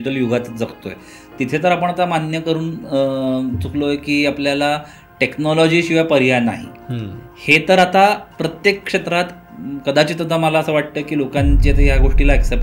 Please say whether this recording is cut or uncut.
uncut